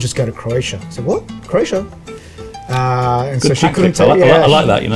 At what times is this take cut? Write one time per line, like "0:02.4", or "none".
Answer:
none